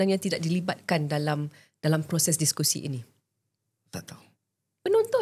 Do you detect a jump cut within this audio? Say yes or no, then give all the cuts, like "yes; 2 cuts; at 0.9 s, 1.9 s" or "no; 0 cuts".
no; 0 cuts